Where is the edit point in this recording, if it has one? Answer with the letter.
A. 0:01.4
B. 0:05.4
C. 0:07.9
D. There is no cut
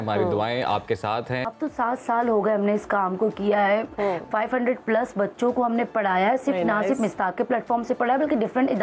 A